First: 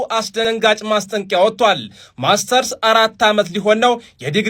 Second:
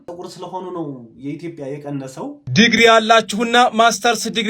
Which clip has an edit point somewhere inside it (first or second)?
second